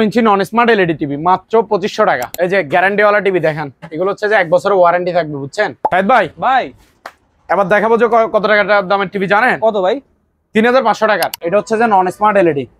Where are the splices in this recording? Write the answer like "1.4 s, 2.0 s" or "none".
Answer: 2.3 s, 5.8 s, 11.4 s